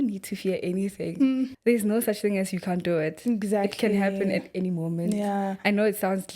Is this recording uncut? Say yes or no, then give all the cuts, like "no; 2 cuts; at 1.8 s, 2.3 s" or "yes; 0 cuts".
no; 1 cut; at 1.6 s